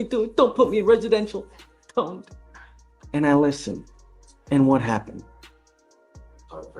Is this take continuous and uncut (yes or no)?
yes